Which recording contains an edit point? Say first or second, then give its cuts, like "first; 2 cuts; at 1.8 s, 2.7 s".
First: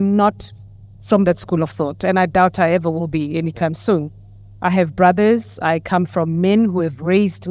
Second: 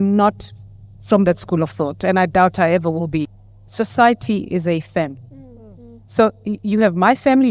second; 1 cut; at 3.3 s